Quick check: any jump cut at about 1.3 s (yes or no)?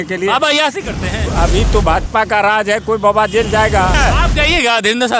yes